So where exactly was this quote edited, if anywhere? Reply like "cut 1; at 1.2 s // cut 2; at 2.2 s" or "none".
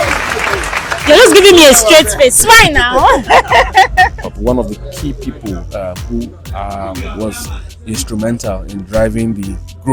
cut 1; at 4.3 s